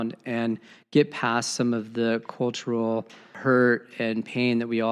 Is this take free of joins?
no; 1 cut; at 3.4 s

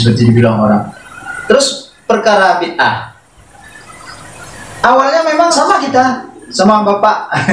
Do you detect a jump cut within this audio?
yes; 1 cut; at 5.5 s

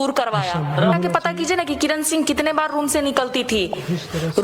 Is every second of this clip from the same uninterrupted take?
no; 1 cut; at 0.9 s

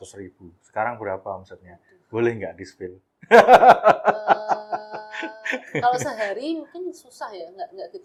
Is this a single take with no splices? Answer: yes; 0 cuts

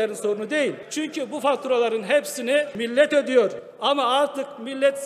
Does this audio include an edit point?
yes; 3 cuts; at 0.8 s, 2.8 s, 3.7 s

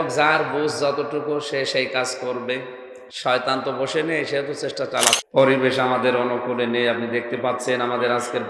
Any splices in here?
yes; 1 cut; at 5.2 s

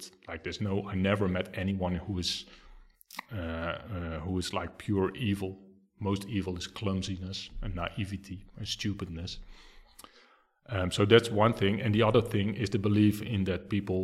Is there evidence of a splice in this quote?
no; 0 cuts

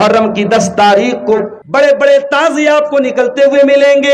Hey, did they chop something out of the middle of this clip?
yes; 1 cut; at 1.6 s

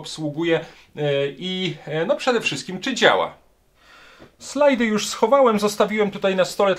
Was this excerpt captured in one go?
yes; 0 cuts

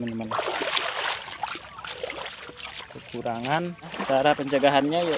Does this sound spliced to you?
yes; 1 cut; at 3.9 s

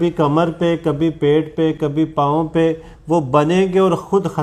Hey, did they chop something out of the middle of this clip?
no; 0 cuts

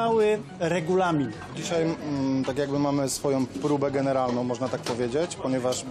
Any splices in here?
yes; 1 cut; at 1.5 s

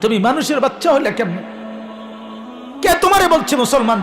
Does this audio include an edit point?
yes; 2 cuts; at 1.4 s, 2.8 s

